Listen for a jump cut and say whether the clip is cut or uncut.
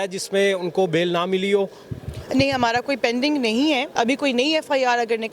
cut